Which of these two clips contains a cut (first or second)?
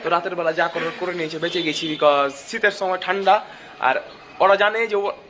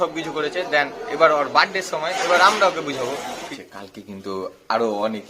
second